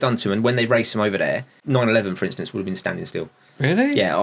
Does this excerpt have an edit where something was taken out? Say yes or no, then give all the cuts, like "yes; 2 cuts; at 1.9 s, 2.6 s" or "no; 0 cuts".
yes; 1 cut; at 1.5 s